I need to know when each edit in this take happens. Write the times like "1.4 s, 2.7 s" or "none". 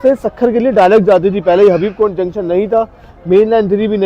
none